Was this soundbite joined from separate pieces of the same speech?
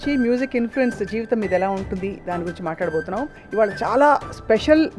yes; 1 cut; at 3.4 s

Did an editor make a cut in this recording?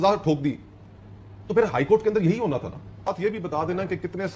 yes; 1 cut; at 3.1 s

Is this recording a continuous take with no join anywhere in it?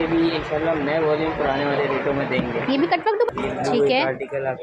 no; 1 cut; at 3.3 s

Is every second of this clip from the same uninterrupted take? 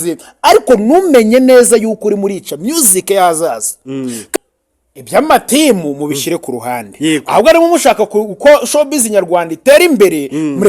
no; 1 cut; at 4.2 s

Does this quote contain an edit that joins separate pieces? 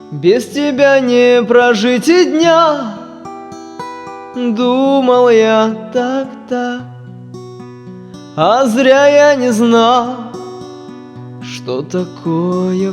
yes; 3 cuts; at 8.4 s, 10.3 s, 11.7 s

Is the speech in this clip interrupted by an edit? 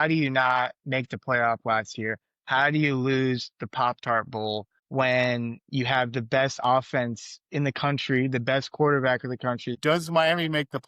yes; 1 cut; at 9.8 s

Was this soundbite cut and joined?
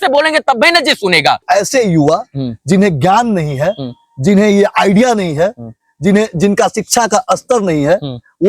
yes; 1 cut; at 1.4 s

